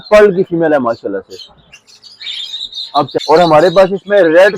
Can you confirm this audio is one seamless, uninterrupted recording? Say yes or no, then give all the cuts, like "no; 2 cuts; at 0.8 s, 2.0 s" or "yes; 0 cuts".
no; 1 cut; at 3.2 s